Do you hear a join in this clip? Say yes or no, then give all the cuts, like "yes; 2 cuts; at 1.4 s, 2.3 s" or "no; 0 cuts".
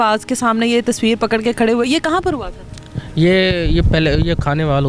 no; 0 cuts